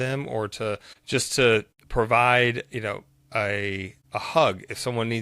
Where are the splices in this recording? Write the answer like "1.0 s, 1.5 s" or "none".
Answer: 0.9 s, 1.8 s, 3.9 s